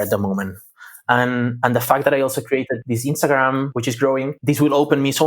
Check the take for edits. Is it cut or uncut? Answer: cut